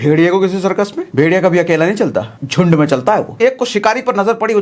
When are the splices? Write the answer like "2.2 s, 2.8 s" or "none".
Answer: 1.0 s, 2.4 s, 3.4 s

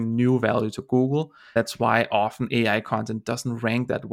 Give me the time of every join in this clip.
1.4 s

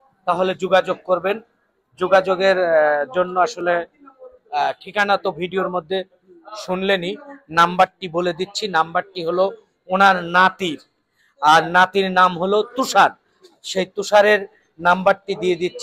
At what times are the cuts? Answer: none

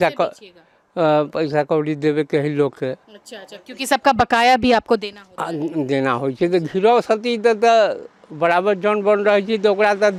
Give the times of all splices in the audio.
none

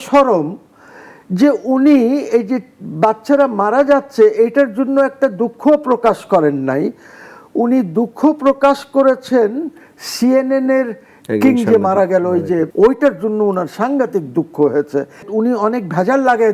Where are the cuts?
12.7 s, 15.3 s

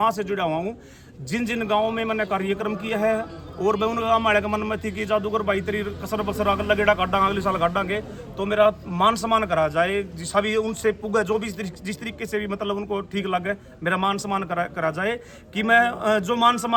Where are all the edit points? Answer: none

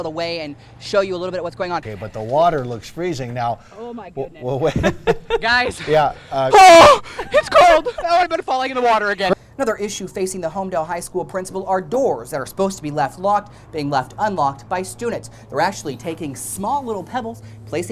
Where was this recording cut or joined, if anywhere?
1.9 s, 9.3 s

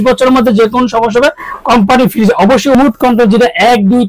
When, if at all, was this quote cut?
2.7 s

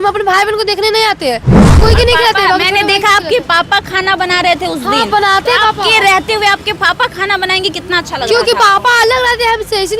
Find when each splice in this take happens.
1.8 s

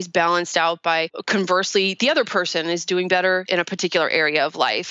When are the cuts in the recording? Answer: 1.2 s, 3.5 s

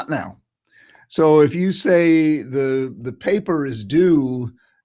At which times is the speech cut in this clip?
none

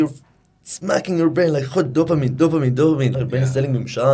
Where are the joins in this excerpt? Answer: 3.1 s

